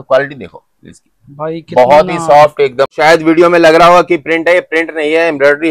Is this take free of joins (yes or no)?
no